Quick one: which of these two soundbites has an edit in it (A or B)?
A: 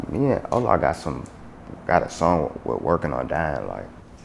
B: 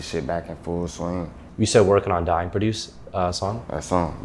B